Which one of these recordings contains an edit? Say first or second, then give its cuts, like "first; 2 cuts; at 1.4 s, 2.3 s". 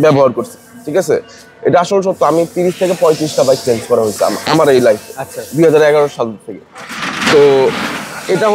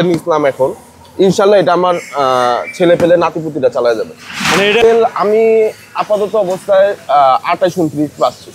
second; 1 cut; at 4.8 s